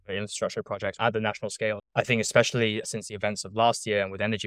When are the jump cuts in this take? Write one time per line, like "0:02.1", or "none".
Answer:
0:00.9
0:01.9